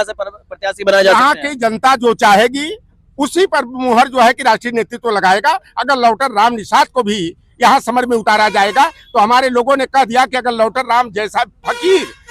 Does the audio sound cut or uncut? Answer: uncut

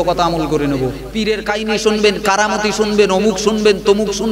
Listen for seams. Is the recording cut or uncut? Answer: cut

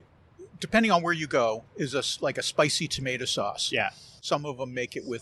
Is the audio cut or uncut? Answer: cut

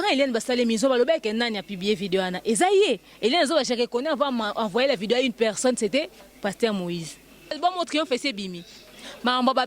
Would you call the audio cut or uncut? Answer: cut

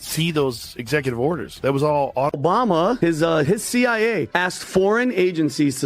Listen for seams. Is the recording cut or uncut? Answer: cut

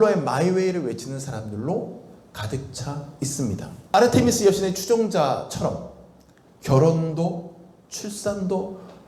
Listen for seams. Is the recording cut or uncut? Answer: cut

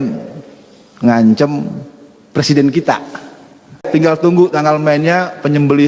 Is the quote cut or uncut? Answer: cut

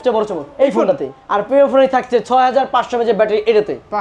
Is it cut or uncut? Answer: cut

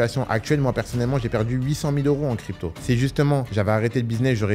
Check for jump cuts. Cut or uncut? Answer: cut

